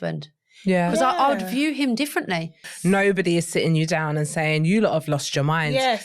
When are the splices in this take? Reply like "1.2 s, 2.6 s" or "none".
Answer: 2.7 s